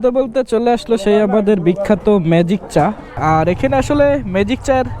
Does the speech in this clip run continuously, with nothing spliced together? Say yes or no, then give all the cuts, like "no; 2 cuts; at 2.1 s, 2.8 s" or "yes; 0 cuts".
no; 1 cut; at 3.1 s